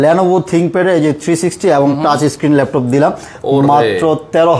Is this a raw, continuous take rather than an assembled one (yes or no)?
yes